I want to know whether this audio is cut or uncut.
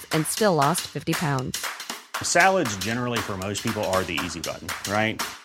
uncut